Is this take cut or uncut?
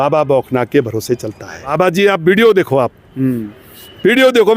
cut